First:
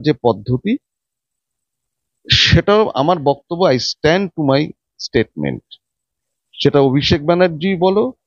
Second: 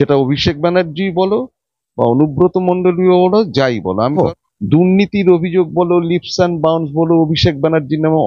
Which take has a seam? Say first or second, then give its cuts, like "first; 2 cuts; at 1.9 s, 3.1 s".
second; 1 cut; at 4.1 s